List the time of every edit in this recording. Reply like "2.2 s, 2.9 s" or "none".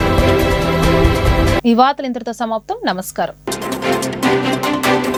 none